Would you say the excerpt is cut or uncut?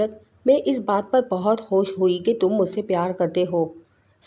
uncut